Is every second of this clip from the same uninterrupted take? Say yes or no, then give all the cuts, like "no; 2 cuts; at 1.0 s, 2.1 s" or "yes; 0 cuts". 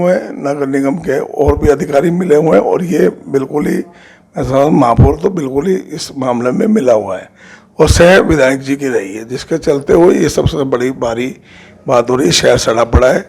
yes; 0 cuts